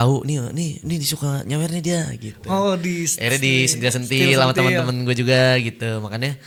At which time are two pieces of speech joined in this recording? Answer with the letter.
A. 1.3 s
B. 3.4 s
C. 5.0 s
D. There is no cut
D